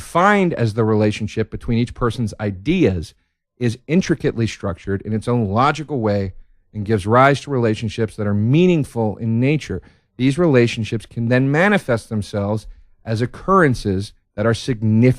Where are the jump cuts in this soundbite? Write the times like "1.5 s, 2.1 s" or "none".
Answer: 8.2 s